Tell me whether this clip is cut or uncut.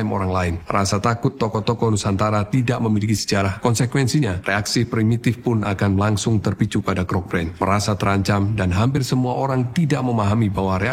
uncut